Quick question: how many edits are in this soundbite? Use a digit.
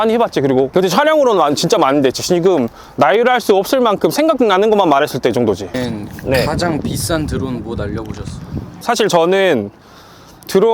1